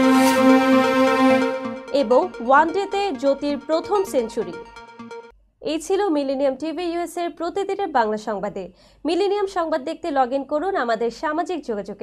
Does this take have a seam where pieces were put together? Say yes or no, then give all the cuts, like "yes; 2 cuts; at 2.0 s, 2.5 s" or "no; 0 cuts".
no; 0 cuts